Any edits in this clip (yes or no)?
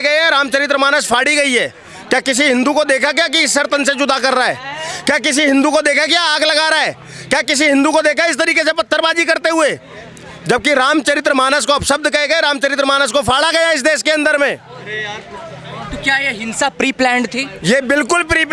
no